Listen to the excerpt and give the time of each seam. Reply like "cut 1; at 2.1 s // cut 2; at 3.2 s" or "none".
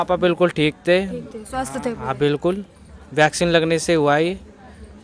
none